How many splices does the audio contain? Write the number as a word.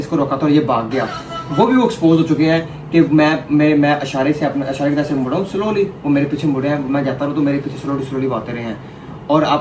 zero